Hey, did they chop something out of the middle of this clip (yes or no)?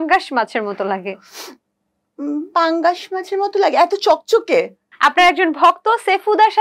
yes